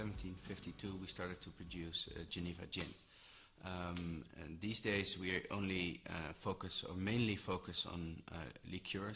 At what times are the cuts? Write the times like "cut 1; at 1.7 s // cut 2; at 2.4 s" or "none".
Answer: cut 1; at 8.1 s